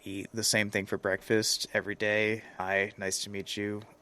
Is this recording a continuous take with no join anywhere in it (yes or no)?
no